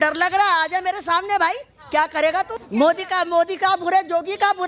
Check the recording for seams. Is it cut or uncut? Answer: cut